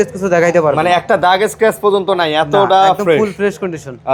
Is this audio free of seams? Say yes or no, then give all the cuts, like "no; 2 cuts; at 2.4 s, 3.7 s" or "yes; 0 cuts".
yes; 0 cuts